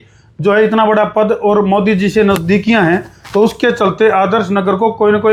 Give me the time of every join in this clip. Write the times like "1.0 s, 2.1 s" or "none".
none

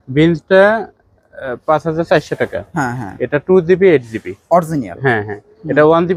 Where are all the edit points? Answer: none

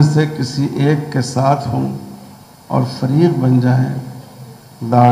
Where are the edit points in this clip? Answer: none

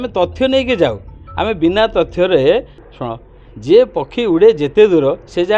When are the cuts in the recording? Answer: 2.8 s

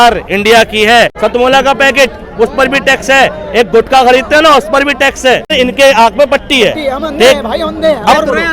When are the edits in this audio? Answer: 1.1 s, 5.5 s

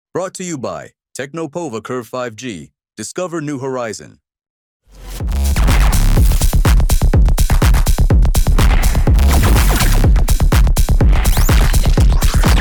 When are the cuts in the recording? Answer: none

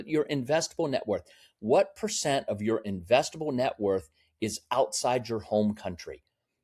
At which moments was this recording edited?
none

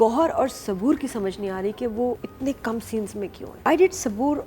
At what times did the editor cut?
2.3 s, 3.7 s

